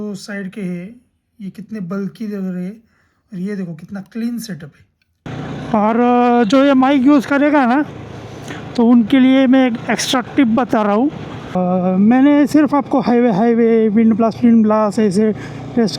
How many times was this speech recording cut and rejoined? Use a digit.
2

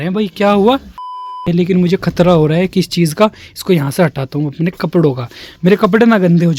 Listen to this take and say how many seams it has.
1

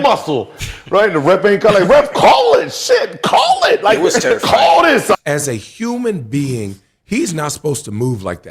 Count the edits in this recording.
1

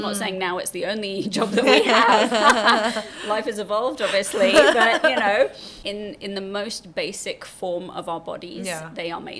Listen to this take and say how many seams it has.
1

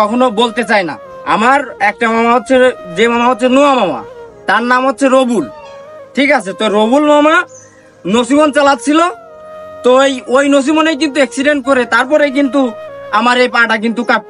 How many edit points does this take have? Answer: 1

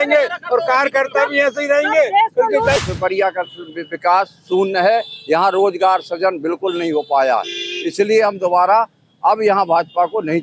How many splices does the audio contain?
1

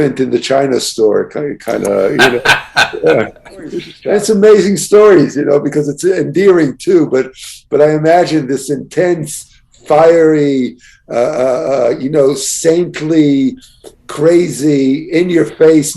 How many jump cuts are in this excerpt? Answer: 1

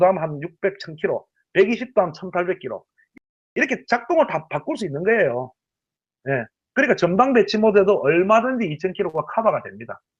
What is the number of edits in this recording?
0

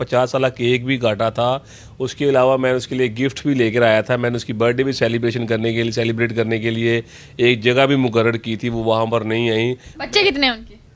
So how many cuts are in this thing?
0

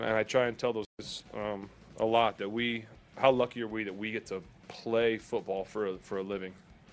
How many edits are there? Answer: 1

